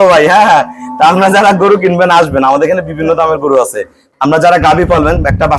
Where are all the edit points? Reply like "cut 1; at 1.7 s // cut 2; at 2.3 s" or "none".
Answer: cut 1; at 4.0 s